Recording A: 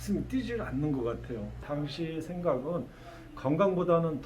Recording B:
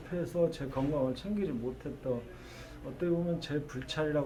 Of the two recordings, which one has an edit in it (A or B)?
A